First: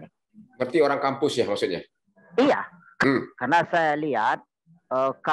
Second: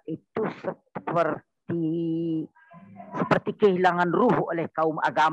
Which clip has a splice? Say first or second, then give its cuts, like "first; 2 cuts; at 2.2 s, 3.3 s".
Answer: first; 1 cut; at 2.8 s